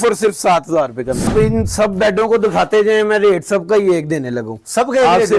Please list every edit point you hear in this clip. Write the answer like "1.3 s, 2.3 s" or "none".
1.3 s